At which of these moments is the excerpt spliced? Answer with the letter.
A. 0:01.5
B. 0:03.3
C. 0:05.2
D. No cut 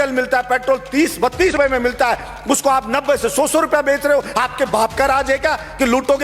A